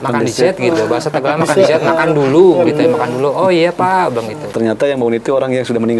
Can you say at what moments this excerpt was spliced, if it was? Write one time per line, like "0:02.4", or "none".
0:04.4